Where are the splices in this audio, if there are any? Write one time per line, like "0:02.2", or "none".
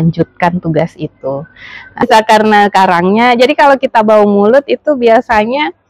0:02.0